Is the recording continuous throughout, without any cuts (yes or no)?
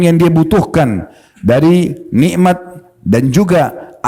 yes